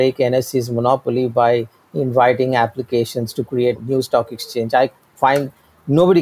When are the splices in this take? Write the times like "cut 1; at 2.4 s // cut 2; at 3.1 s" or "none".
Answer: cut 1; at 3.8 s

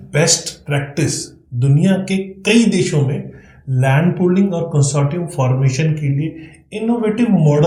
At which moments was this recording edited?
none

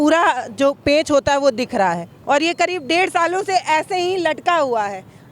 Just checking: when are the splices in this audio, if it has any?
cut 1; at 2.1 s

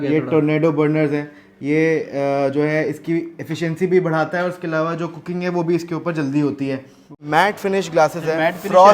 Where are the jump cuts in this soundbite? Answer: cut 1; at 7.2 s

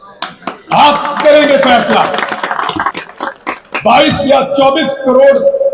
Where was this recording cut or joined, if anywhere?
cut 1; at 2.9 s

